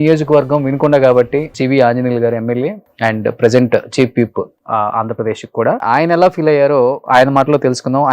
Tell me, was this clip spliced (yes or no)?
yes